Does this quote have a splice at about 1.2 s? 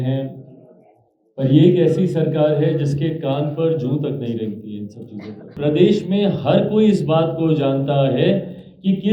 no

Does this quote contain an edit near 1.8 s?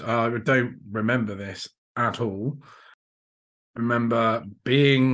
no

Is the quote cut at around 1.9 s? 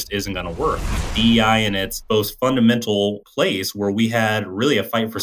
yes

